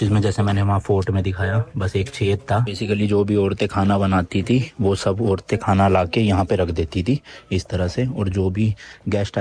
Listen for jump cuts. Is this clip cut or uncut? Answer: cut